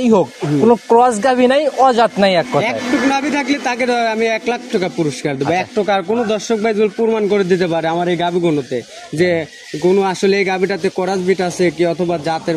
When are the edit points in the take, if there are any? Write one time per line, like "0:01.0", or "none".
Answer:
none